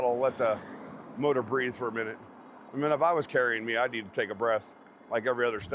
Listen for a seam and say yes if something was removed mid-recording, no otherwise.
no